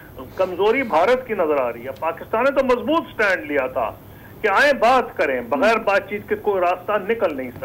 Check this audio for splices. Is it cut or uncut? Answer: uncut